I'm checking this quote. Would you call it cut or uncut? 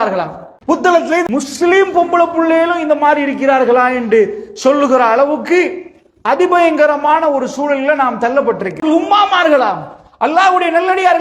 cut